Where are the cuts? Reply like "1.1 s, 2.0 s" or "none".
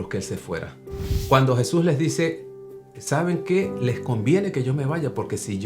1.3 s